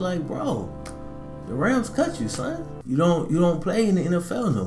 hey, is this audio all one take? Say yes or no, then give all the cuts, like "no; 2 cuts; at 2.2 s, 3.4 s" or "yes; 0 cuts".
yes; 0 cuts